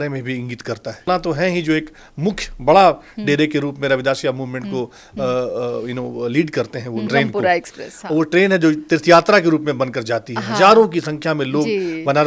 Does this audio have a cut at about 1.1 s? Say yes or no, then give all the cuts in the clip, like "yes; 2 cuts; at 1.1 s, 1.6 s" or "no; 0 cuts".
yes; 2 cuts; at 1.1 s, 7.1 s